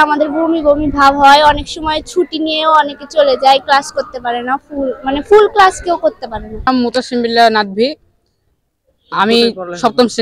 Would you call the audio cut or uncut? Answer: uncut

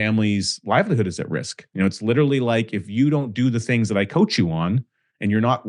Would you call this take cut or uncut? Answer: cut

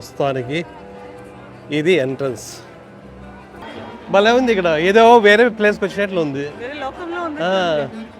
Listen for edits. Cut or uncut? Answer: cut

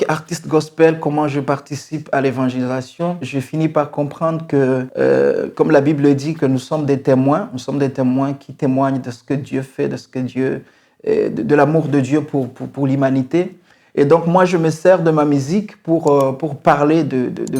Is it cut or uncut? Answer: cut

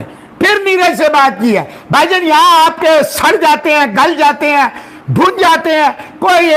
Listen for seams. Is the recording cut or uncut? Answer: uncut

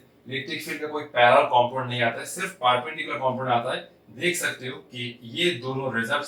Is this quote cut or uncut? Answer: uncut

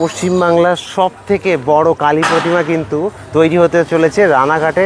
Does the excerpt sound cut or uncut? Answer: uncut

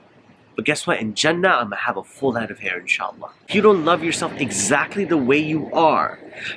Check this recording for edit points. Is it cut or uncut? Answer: cut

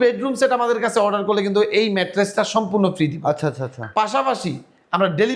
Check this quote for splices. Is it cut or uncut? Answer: uncut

